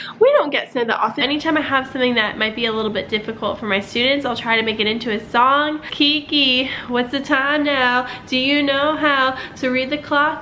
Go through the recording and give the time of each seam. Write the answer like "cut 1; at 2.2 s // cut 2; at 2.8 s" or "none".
cut 1; at 1.2 s // cut 2; at 5.9 s